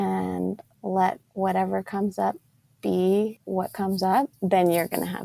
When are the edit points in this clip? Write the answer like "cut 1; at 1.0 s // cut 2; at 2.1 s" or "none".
cut 1; at 1.2 s // cut 2; at 3.4 s // cut 3; at 4.3 s